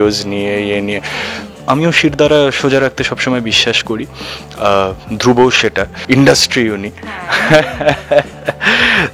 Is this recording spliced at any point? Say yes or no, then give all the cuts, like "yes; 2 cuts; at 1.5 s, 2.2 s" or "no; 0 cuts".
yes; 2 cuts; at 1.5 s, 5.9 s